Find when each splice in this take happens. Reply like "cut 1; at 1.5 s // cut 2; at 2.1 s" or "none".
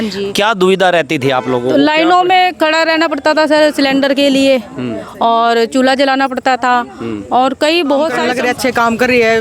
cut 1; at 8.2 s